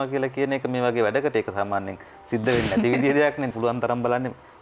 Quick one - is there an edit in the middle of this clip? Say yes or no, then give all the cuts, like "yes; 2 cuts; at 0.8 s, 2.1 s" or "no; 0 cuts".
yes; 1 cut; at 3.5 s